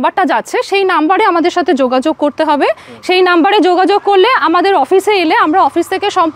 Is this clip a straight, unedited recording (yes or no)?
yes